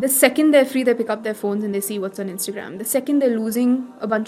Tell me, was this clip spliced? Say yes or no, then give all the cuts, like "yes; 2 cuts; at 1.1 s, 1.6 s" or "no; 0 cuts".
no; 0 cuts